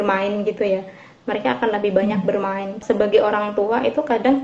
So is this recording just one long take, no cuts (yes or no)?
no